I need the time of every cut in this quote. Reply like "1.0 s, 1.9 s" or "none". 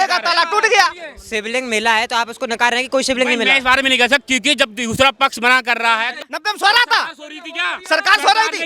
6.1 s